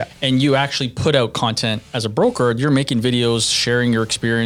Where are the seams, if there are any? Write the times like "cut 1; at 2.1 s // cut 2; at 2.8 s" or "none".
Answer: none